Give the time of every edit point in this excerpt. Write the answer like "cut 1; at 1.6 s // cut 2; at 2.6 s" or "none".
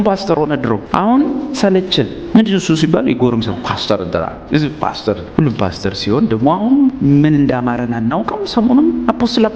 cut 1; at 0.8 s // cut 2; at 2.2 s // cut 3; at 5.2 s // cut 4; at 7.0 s